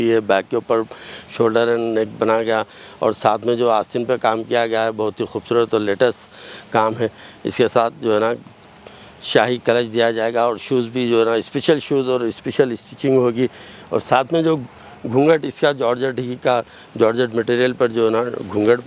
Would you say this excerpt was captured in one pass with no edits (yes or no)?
yes